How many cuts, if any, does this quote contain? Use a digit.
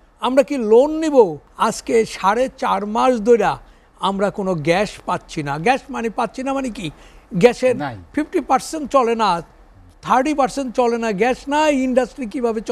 1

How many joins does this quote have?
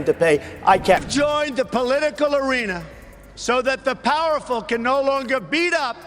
1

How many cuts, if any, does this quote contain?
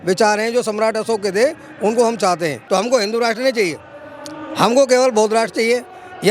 1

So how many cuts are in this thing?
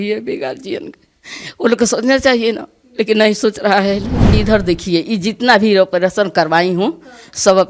1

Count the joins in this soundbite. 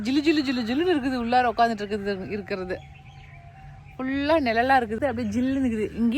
1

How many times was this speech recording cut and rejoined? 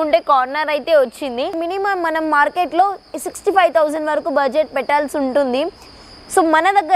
1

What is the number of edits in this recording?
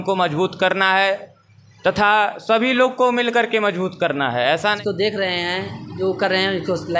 1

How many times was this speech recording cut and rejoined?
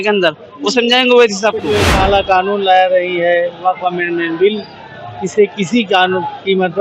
1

